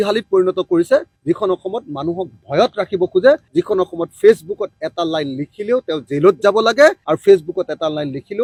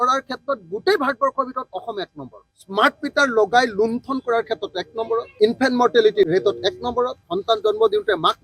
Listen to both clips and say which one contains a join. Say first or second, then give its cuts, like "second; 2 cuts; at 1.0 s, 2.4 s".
second; 3 cuts; at 2.5 s, 5.3 s, 7.3 s